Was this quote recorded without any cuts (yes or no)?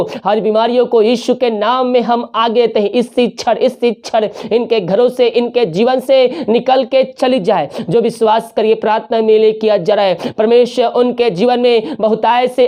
yes